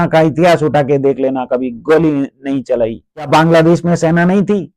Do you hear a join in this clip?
yes; 1 cut; at 3.3 s

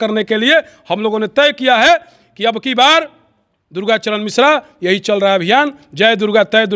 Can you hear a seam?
no; 0 cuts

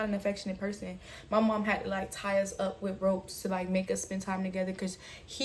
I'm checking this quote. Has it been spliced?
no; 0 cuts

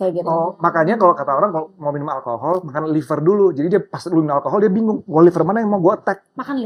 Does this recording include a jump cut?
no; 0 cuts

